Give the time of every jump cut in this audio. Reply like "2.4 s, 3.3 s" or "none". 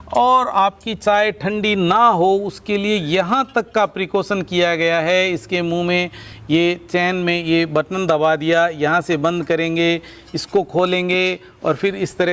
none